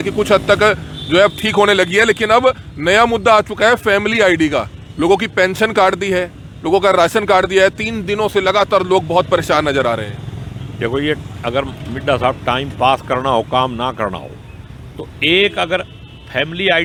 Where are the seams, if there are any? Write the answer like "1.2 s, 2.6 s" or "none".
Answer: none